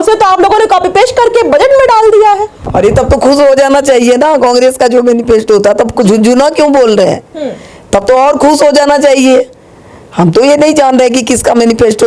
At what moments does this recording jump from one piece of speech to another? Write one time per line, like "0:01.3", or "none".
none